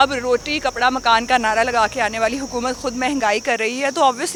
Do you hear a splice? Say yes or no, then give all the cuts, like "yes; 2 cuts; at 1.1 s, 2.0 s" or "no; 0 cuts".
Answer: no; 0 cuts